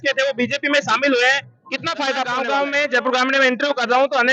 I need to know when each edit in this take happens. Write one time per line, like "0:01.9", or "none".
0:02.2